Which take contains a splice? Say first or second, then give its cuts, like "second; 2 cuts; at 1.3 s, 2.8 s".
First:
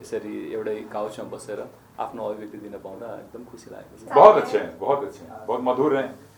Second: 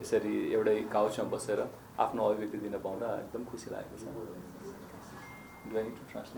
first; 1 cut; at 4.0 s